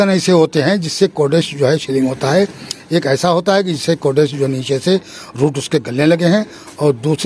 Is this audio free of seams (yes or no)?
yes